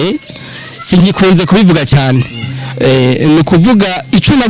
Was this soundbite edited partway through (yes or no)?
no